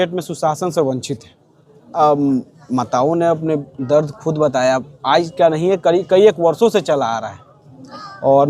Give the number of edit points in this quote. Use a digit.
1